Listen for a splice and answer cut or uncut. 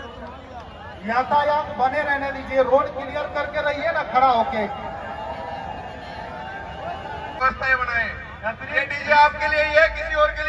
cut